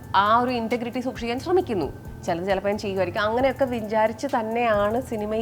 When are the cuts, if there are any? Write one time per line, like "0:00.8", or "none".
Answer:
0:02.0